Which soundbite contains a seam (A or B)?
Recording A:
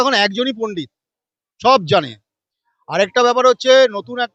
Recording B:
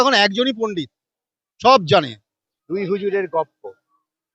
B